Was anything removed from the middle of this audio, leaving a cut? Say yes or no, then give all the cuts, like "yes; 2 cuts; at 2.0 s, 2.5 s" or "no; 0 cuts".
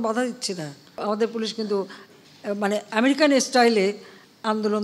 yes; 1 cut; at 0.9 s